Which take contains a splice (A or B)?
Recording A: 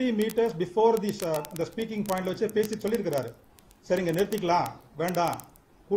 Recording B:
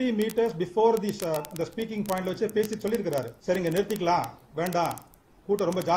B